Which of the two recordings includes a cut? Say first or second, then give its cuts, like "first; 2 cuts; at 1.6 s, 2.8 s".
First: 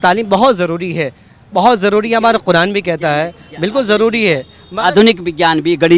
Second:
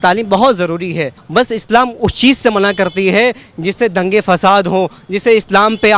second; 1 cut; at 1.2 s